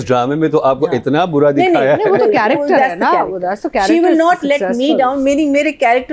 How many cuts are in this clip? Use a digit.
0